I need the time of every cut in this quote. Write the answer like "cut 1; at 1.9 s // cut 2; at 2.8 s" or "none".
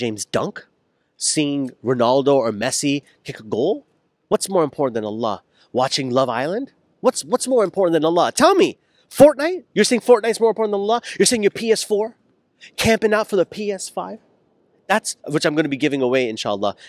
none